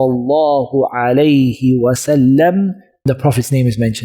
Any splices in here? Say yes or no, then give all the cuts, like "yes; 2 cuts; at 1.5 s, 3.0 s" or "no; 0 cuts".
yes; 1 cut; at 3.0 s